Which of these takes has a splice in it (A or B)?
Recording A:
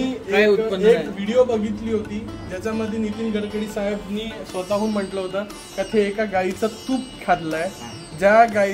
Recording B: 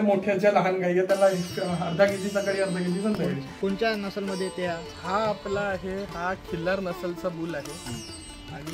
B